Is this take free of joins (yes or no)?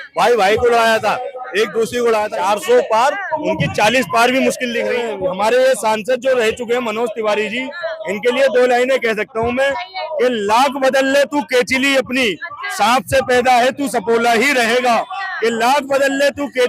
no